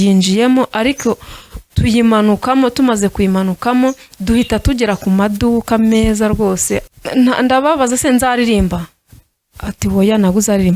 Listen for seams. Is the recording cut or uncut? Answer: cut